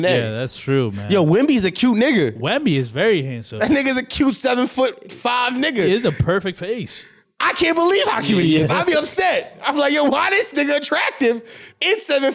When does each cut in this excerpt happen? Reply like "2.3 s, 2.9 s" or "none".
none